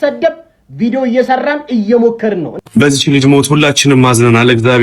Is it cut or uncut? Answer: cut